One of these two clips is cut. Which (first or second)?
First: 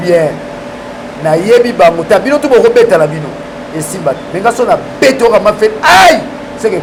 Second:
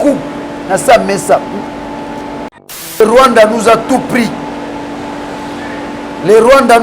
second